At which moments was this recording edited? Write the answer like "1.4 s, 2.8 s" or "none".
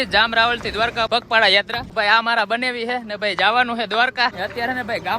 1.1 s, 1.8 s, 4.3 s